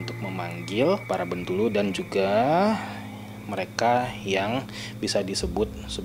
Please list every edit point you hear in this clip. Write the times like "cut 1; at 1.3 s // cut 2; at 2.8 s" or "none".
cut 1; at 1.0 s